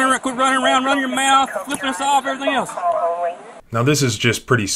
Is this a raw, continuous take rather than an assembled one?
yes; 0 cuts

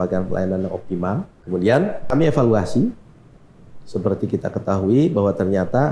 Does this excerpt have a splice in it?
yes; 2 cuts; at 1.4 s, 2.1 s

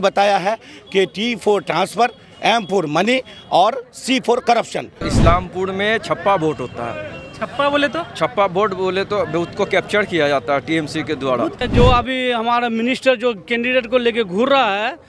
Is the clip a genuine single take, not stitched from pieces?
no; 2 cuts; at 5.0 s, 11.6 s

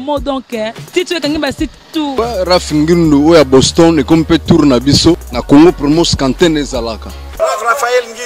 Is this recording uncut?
no; 3 cuts; at 2.1 s, 5.3 s, 7.3 s

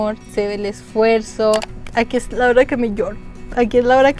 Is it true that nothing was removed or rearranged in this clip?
no; 1 cut; at 1.8 s

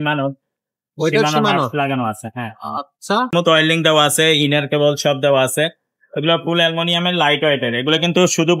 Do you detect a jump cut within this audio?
yes; 1 cut; at 3.3 s

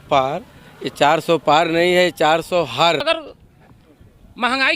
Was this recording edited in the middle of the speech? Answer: yes; 1 cut; at 3.0 s

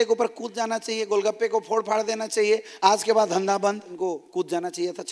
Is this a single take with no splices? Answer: no; 1 cut; at 3.9 s

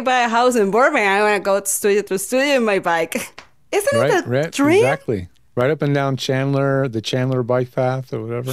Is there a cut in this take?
no; 0 cuts

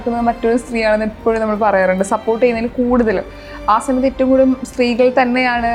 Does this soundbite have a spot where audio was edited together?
no; 0 cuts

